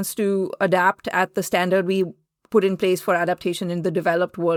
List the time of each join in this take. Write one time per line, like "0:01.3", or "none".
none